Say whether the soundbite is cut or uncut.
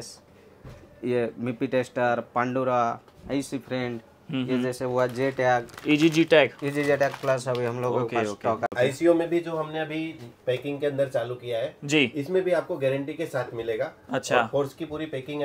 cut